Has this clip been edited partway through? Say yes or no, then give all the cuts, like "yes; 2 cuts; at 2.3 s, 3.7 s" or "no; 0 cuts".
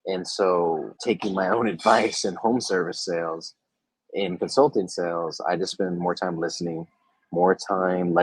yes; 1 cut; at 0.9 s